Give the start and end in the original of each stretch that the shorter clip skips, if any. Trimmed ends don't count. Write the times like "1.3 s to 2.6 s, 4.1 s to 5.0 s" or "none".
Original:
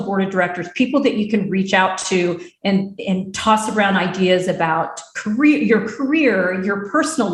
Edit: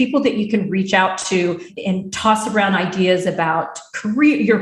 2.5 s to 2.9 s

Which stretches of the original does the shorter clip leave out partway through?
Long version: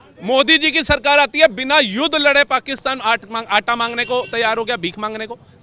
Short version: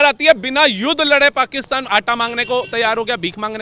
3.0 s to 3.4 s

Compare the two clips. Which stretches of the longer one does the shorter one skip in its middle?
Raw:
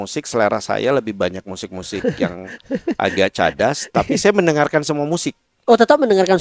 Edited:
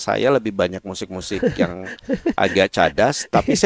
none

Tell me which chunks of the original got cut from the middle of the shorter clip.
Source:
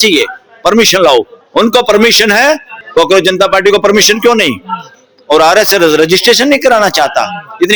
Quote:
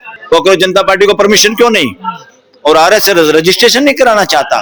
none

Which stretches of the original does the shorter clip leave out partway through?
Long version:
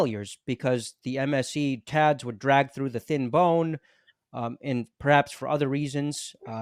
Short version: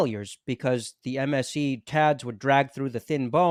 none

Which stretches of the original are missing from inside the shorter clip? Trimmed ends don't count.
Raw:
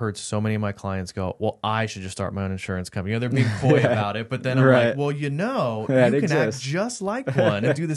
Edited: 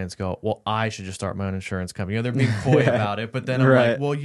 none

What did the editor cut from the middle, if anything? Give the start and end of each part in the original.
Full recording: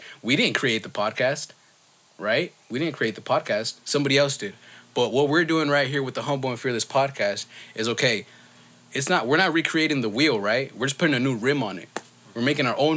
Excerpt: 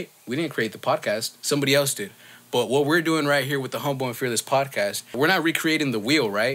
7.6 s to 9.2 s

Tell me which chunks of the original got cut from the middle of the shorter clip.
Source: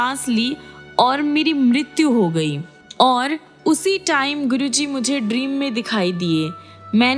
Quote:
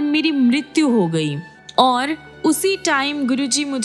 none

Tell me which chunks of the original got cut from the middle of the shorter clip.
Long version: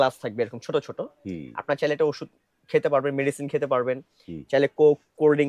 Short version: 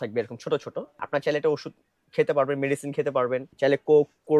1.1 s to 1.5 s, 4.0 s to 4.4 s

